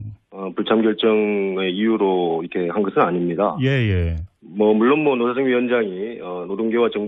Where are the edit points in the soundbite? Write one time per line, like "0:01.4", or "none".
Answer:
0:05.6